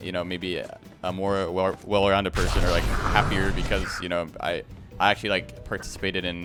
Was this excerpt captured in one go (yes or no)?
yes